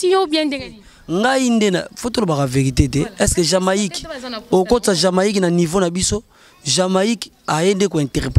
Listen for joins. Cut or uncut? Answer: uncut